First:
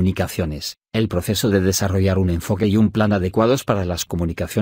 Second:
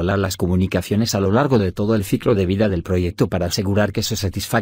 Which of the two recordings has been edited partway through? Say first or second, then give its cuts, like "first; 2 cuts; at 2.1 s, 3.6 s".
first; 1 cut; at 1.2 s